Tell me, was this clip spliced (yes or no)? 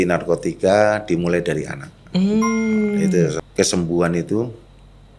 yes